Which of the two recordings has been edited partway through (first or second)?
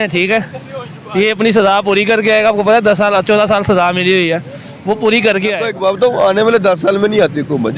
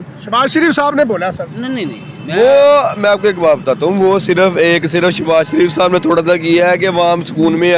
first